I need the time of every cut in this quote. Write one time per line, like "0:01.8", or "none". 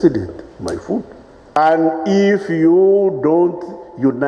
0:01.6

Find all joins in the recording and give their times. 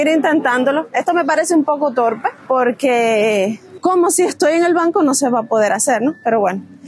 none

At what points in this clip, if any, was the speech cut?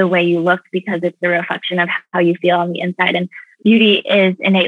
none

